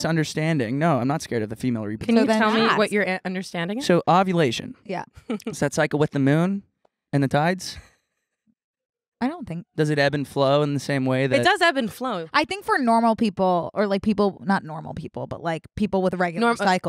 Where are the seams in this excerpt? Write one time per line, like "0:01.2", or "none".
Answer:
none